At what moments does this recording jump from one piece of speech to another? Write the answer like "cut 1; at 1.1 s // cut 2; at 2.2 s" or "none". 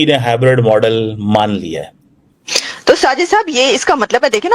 cut 1; at 2.7 s